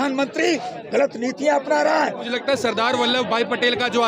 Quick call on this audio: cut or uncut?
cut